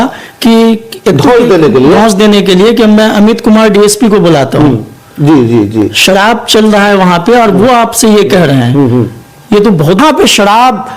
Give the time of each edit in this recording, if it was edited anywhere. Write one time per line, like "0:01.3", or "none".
0:10.0